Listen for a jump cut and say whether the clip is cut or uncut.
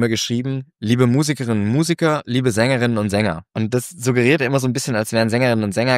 cut